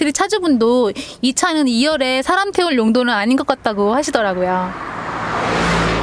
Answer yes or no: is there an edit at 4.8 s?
yes